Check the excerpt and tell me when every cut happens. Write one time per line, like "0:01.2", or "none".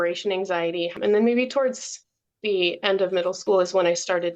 0:01.0
0:03.4